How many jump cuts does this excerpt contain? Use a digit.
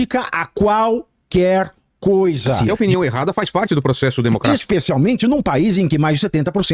2